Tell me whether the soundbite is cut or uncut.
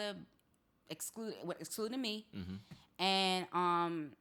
uncut